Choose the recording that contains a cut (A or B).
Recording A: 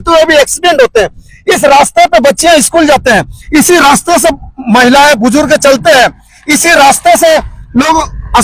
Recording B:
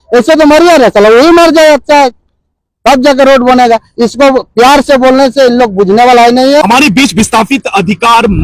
B